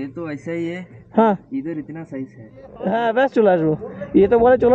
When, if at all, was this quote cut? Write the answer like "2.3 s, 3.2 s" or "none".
2.7 s